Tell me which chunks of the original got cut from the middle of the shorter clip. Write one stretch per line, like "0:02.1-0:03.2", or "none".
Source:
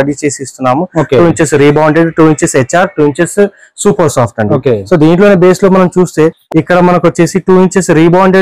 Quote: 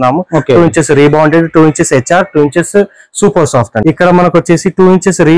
0:04.4-0:06.4

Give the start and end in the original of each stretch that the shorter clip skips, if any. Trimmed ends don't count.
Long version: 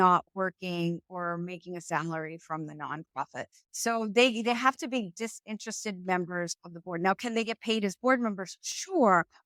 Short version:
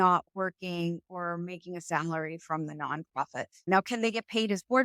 0:03.7-0:07.0

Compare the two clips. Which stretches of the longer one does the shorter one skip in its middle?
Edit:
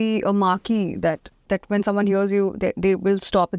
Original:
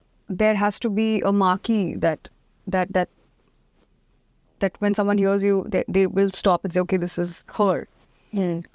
0:02.3-0:04.4

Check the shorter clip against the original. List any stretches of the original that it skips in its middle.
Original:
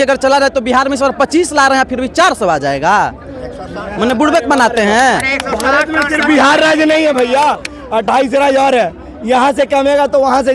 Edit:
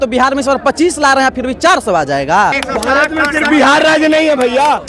0:03.2-0:05.4

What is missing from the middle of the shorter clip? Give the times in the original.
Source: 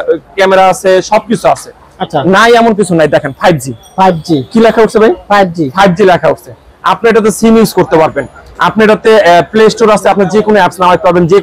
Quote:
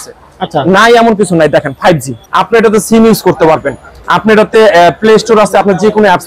0:03.7-0:06.7

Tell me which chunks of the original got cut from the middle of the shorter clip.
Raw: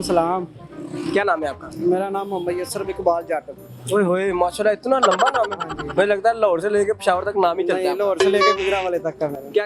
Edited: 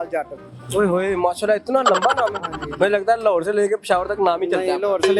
none

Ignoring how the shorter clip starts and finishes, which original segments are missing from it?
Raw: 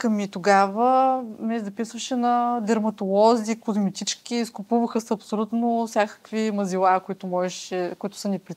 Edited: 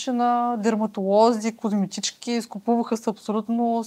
none

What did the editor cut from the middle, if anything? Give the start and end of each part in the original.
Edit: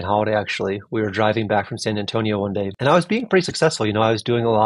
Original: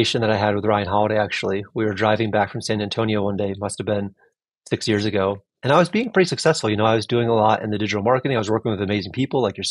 0:03.6-0:05.6

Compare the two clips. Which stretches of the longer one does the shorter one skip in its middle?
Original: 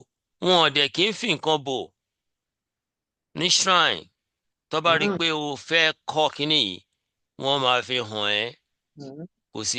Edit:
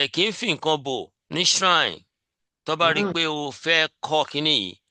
0:02.0-0:03.2

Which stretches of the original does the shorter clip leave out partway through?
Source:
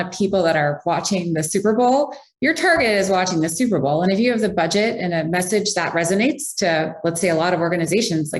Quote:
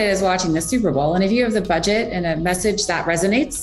none

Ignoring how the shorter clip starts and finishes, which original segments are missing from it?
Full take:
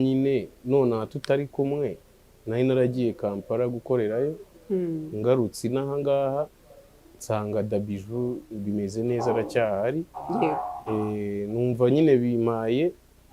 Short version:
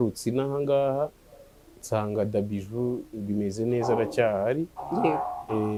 none

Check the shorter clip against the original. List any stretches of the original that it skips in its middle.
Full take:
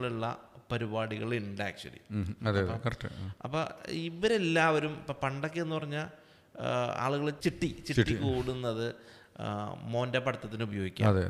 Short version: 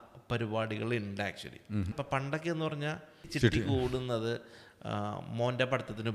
0:02.3-0:05.0
0:06.4-0:07.8

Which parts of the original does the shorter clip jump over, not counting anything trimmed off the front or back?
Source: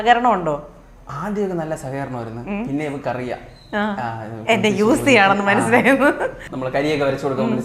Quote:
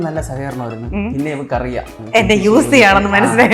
0:03.5-0:04.3

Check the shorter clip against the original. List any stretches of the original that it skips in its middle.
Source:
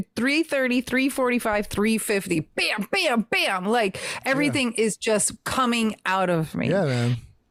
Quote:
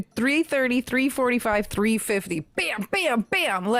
none

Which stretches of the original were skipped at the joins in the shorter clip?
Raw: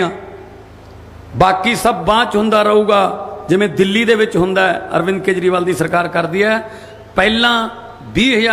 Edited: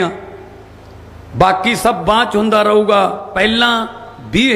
0:03.2-0:07.1

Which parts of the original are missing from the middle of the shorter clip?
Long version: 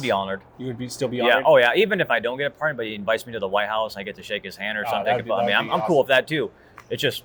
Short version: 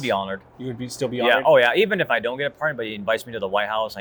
none

